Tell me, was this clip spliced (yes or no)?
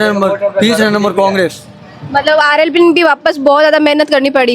no